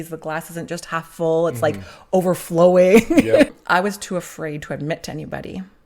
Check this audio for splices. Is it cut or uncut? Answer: cut